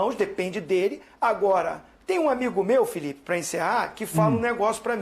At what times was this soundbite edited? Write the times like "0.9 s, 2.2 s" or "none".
none